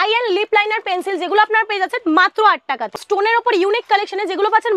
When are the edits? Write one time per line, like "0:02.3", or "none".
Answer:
0:03.0